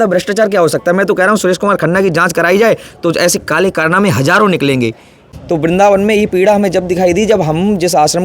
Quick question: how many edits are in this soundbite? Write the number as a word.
one